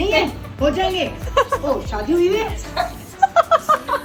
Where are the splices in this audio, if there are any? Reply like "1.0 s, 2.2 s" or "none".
none